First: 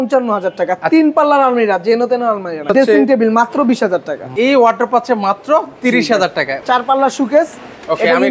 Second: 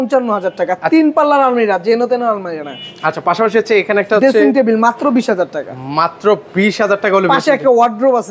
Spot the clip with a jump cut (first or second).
first